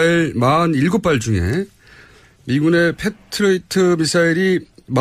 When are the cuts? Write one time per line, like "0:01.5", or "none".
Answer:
none